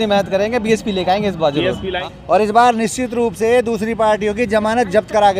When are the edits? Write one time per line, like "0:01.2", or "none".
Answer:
0:01.9

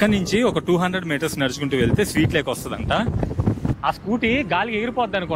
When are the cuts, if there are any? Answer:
0:03.9

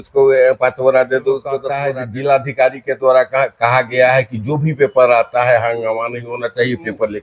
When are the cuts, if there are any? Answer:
0:01.7

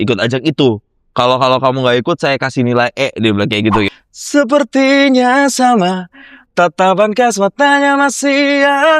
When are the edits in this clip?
0:03.9

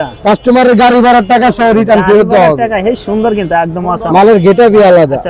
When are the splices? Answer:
none

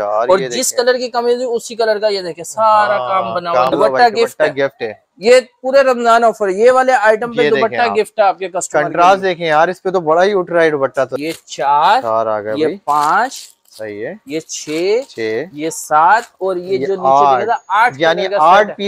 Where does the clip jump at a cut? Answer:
0:03.7
0:11.1

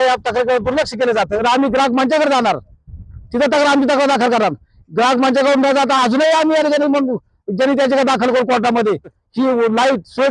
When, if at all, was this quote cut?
0:01.3
0:09.2

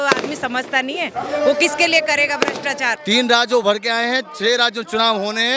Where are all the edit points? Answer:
0:02.9

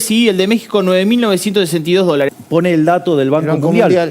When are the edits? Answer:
0:02.3

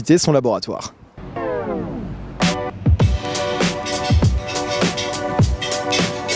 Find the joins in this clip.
0:04.7

